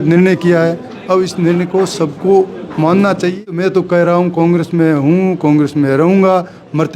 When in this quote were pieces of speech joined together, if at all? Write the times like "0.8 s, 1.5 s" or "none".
3.6 s